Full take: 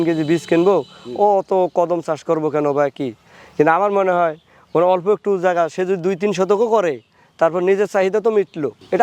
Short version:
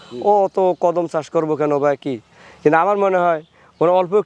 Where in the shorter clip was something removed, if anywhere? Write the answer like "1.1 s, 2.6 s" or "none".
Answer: none